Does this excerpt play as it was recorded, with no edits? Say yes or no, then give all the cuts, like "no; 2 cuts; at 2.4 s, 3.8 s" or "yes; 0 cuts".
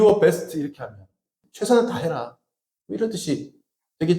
no; 1 cut; at 1.4 s